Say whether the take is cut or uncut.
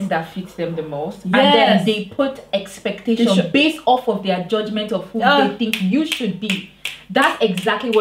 uncut